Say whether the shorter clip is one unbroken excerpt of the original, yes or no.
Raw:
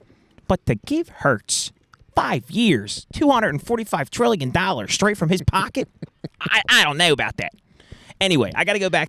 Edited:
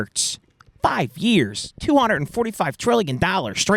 yes